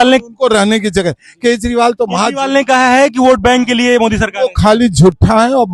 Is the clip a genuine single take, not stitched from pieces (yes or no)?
yes